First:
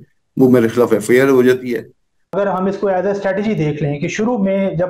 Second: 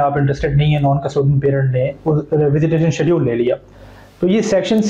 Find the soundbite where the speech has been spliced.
first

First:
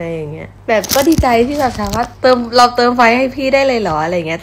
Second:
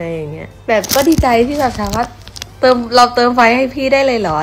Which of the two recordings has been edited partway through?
first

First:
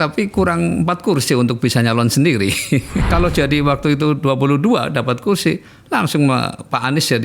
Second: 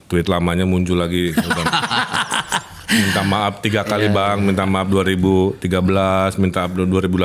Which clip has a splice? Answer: first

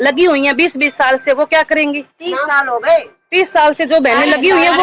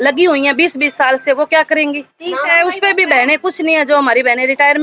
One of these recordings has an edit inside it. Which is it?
second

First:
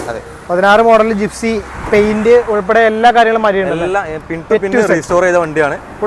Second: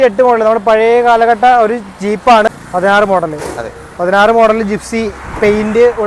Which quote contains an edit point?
second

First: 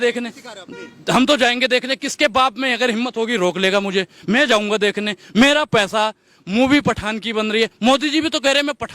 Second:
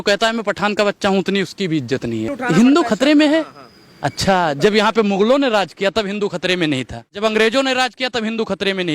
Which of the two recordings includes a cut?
second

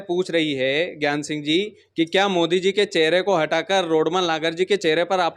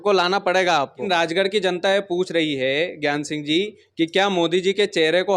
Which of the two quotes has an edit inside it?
second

